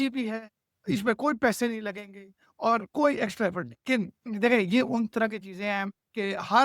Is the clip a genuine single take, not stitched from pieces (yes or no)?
no